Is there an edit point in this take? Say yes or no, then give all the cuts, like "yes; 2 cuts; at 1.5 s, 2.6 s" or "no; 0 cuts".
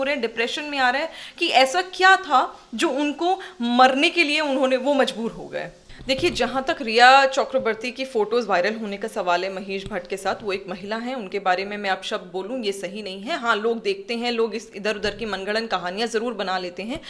yes; 1 cut; at 5.8 s